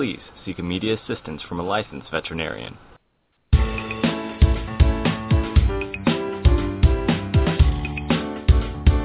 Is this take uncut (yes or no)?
no